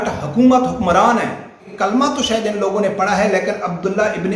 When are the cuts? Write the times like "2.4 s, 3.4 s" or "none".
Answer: 1.6 s